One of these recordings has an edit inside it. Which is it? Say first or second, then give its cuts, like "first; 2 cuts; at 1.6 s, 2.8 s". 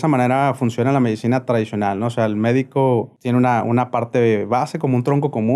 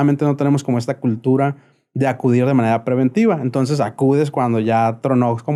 first; 1 cut; at 3.2 s